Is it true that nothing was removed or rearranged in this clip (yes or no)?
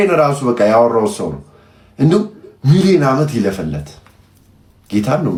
yes